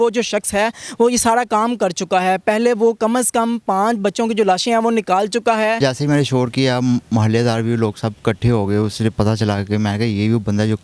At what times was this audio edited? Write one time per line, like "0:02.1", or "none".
0:05.8